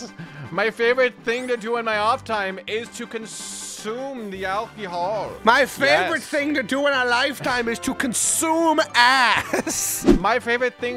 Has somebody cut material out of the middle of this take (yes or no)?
yes